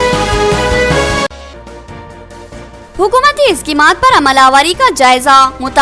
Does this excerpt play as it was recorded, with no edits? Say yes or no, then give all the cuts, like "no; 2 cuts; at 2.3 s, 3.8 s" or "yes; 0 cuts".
no; 1 cut; at 1.2 s